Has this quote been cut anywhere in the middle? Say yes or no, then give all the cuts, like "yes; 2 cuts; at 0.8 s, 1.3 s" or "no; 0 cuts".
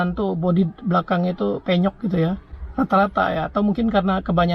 no; 0 cuts